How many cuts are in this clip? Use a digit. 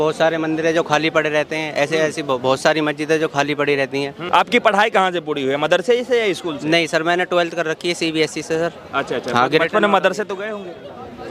1